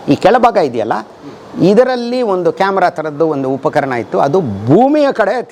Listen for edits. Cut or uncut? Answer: uncut